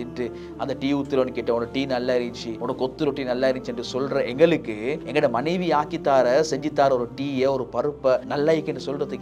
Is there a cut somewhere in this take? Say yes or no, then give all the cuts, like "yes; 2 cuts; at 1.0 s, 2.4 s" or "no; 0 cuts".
yes; 3 cuts; at 2.5 s, 5.0 s, 8.3 s